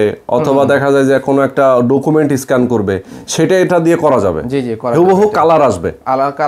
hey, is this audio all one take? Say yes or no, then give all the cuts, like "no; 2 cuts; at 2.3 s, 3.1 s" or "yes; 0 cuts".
yes; 0 cuts